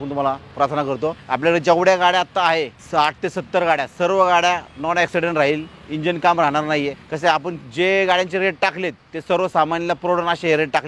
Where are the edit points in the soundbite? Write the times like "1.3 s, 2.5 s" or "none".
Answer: 1.2 s, 2.8 s, 7.0 s